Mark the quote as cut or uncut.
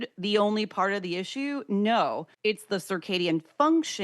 cut